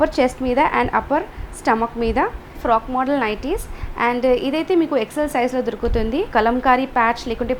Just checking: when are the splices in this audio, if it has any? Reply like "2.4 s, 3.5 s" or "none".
2.6 s, 6.3 s